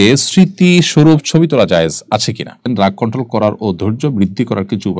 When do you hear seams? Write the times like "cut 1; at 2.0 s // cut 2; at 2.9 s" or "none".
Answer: cut 1; at 2.7 s